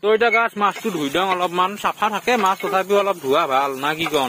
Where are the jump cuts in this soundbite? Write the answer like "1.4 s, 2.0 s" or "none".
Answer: none